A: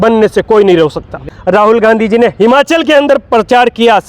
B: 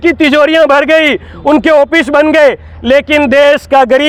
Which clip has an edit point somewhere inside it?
A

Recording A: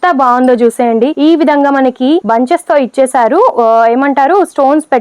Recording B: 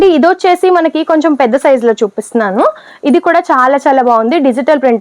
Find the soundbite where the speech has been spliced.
A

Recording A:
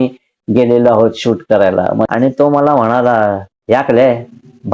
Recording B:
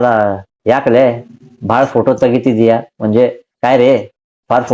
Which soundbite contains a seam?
A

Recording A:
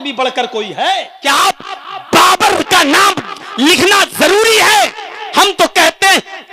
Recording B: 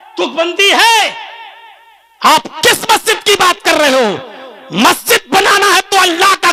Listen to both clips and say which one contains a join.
A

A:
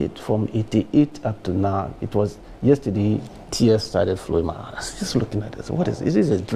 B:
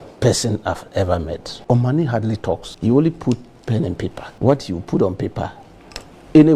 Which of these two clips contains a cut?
B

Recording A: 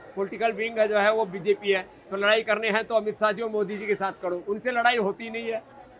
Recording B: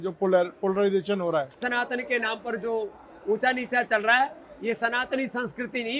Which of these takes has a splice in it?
B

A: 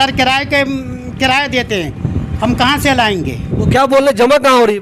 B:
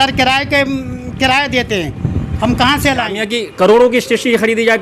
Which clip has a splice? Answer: B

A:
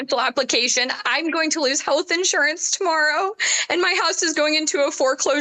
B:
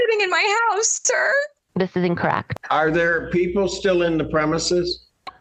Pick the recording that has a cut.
B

